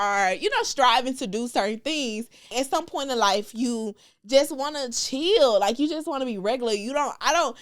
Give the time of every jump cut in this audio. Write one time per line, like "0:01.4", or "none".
0:02.5